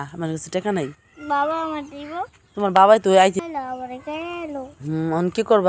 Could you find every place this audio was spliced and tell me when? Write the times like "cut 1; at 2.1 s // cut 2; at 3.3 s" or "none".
cut 1; at 3.4 s